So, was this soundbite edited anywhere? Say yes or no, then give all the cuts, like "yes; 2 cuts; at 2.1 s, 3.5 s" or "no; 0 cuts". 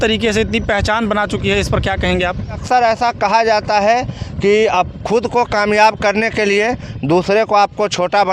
yes; 1 cut; at 2.6 s